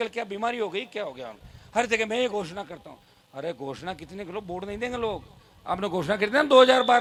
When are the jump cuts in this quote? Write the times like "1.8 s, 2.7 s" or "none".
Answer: none